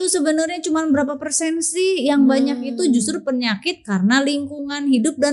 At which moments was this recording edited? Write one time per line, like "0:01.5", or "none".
none

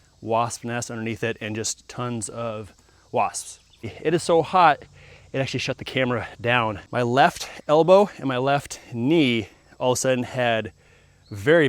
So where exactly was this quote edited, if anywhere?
0:03.9
0:06.8

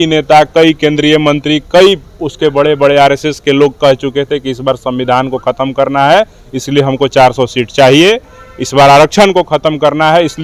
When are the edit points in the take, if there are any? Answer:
none

